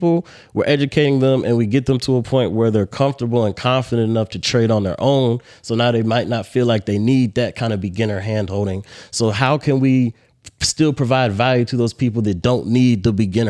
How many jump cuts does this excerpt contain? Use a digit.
0